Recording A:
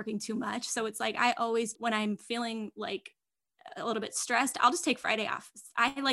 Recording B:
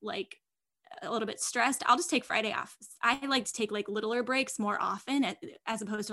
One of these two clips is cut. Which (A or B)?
A